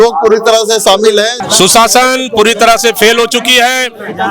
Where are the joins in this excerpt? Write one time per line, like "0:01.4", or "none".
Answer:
0:01.4